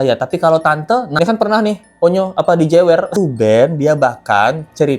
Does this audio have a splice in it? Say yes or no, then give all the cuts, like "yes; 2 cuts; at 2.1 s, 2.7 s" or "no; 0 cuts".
yes; 2 cuts; at 1.1 s, 3.2 s